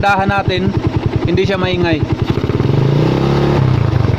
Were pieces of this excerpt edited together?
no; 0 cuts

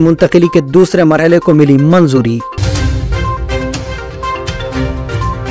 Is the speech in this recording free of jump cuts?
no; 1 cut; at 2.5 s

